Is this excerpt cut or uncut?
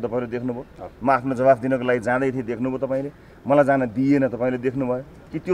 uncut